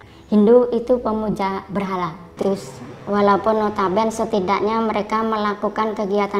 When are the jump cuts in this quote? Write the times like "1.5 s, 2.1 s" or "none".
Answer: 2.2 s